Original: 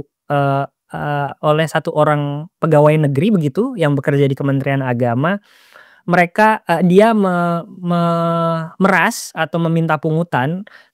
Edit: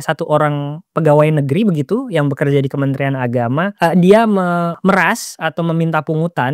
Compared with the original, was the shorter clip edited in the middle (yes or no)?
yes